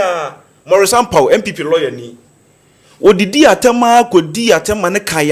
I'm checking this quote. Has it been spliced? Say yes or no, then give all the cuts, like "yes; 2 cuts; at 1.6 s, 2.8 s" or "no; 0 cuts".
no; 0 cuts